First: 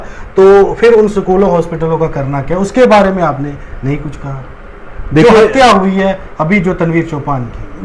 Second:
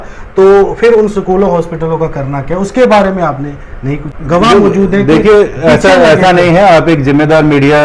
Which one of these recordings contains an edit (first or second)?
second